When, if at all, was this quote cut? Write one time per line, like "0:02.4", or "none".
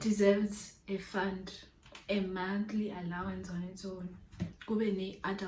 none